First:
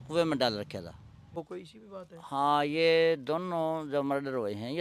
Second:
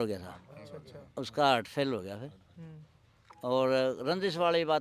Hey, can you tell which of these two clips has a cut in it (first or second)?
first